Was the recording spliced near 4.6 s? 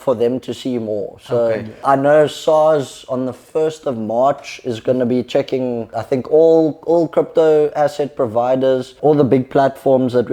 no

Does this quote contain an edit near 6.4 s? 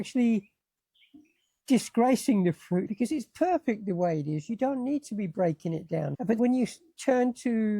yes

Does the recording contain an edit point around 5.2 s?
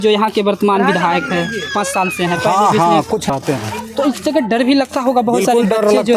no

